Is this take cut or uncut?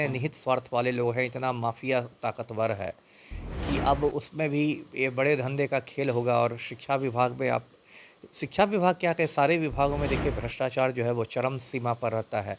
uncut